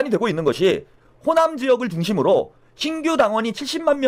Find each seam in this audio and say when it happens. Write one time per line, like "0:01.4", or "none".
none